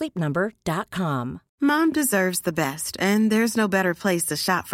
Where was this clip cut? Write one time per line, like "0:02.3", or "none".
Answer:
0:01.4